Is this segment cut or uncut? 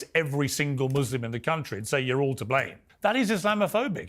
cut